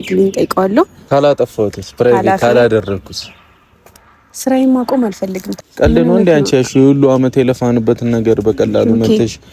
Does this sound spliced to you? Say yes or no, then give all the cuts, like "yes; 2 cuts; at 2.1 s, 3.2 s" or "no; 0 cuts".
yes; 2 cuts; at 1.0 s, 5.4 s